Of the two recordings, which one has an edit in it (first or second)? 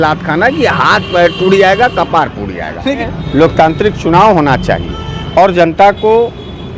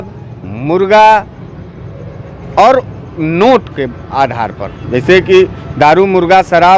first